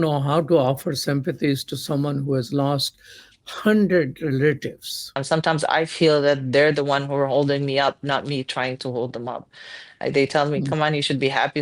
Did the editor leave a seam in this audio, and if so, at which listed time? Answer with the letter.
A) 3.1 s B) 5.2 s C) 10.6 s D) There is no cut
B